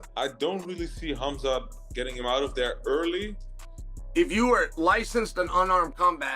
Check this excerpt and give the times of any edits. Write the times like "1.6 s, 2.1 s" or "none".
3.8 s